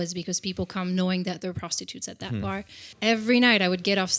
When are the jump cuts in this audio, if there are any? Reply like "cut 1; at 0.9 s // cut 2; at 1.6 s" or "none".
cut 1; at 2.9 s